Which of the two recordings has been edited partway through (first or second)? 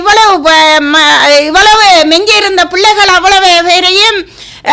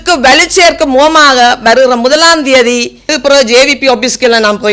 second